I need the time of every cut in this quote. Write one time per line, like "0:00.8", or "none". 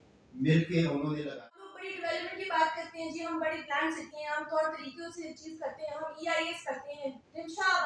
0:01.4